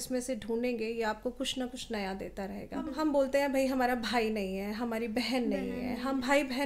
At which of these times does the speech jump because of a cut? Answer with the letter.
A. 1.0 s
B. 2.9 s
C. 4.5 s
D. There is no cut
B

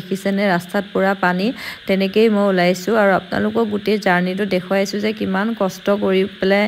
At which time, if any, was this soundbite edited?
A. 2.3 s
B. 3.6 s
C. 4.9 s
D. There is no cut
D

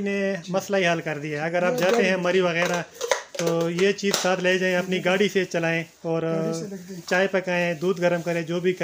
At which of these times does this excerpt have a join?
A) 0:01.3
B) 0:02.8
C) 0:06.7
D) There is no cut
D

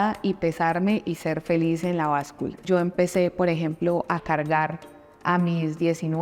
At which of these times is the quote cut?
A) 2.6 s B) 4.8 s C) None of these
A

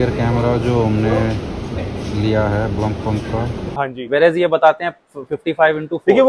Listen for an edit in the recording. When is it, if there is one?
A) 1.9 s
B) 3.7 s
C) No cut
B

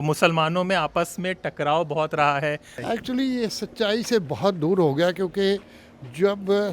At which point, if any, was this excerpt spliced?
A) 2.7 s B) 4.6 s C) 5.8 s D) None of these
A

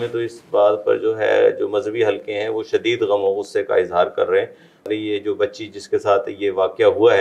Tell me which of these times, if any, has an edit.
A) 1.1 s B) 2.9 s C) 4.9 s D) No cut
C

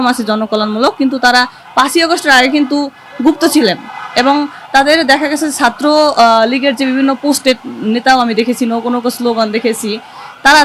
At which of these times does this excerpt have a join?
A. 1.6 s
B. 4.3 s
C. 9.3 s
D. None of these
D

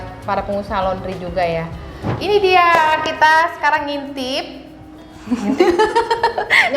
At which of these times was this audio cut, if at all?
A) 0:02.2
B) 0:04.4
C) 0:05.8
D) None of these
A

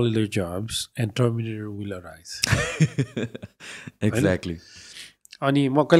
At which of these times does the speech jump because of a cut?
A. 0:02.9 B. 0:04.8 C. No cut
C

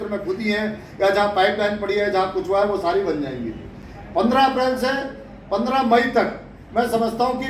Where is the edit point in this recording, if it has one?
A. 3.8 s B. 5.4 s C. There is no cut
C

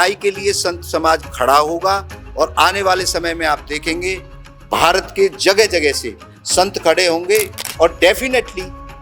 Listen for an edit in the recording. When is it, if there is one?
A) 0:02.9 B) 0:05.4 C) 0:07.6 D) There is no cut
C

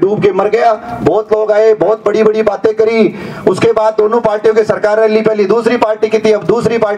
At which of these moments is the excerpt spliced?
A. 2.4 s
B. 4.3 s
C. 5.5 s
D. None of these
D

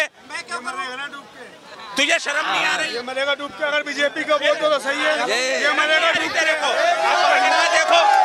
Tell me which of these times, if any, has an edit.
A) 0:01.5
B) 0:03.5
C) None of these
C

